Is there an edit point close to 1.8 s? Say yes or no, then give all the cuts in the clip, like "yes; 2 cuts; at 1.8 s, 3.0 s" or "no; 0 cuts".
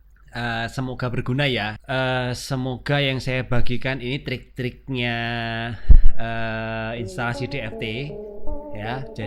yes; 1 cut; at 1.8 s